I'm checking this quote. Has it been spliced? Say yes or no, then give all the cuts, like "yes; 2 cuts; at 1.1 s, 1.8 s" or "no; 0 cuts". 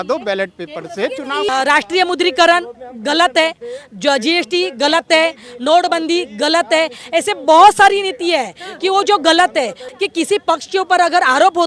yes; 2 cuts; at 1.5 s, 9.8 s